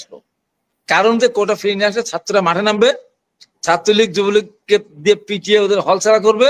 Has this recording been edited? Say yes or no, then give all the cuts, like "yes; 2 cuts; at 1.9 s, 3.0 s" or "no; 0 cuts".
no; 0 cuts